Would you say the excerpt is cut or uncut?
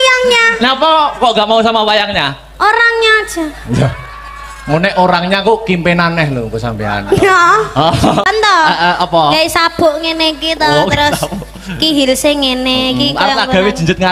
cut